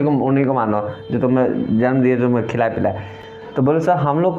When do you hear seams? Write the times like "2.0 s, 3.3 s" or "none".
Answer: none